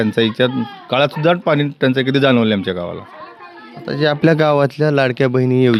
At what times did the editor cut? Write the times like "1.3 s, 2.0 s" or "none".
none